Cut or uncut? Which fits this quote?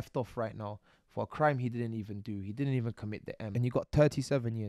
cut